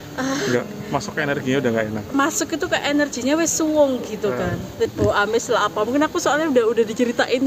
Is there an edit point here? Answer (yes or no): yes